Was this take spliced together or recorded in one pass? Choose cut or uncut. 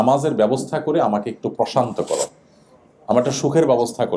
uncut